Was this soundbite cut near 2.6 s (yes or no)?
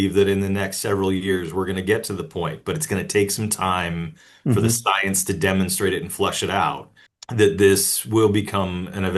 no